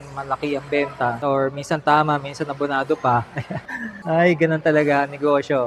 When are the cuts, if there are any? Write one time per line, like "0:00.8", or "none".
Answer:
none